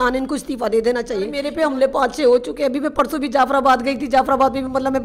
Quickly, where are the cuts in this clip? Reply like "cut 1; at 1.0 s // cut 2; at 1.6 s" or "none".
cut 1; at 1.4 s